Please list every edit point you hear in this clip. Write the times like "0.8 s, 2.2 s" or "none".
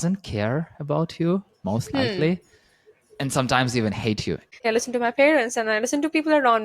4.6 s